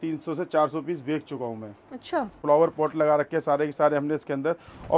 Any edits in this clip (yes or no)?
yes